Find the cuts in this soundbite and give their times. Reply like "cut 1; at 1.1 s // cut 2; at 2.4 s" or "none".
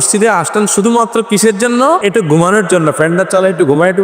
cut 1; at 2.0 s